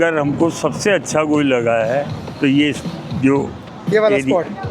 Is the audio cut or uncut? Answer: uncut